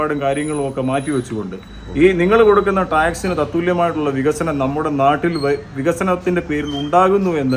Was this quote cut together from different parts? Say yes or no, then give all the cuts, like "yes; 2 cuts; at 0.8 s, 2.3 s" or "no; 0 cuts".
no; 0 cuts